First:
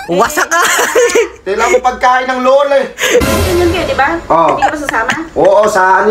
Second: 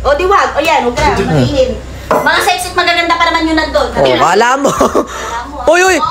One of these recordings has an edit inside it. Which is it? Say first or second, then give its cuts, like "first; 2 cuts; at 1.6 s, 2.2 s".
first; 1 cut; at 3.3 s